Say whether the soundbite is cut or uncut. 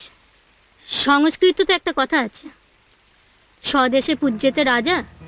uncut